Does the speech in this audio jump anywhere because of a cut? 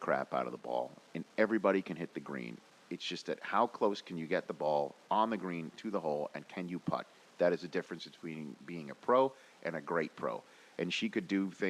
yes; 1 cut; at 2.4 s

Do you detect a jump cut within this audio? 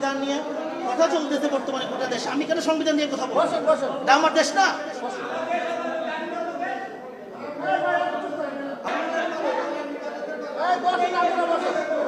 yes; 1 cut; at 8.9 s

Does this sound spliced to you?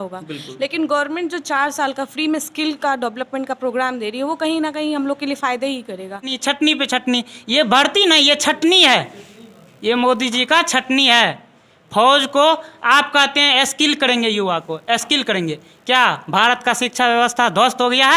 yes; 1 cut; at 6.4 s

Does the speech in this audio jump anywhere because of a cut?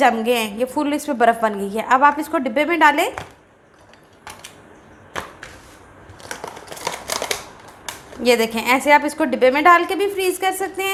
no; 0 cuts

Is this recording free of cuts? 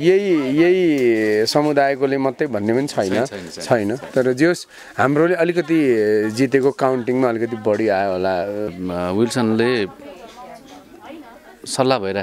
no; 1 cut; at 8.7 s

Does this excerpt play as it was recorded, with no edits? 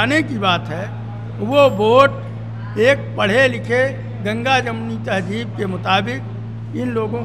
yes; 0 cuts

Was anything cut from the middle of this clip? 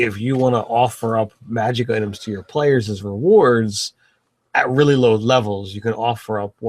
yes; 1 cut; at 2.3 s

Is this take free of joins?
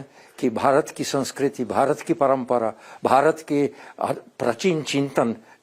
yes; 0 cuts

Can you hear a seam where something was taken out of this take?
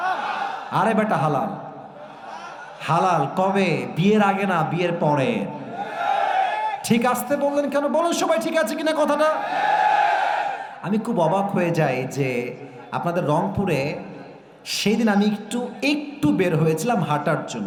no; 0 cuts

